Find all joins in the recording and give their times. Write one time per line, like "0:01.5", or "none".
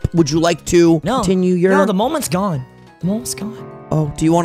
0:01.1
0:03.5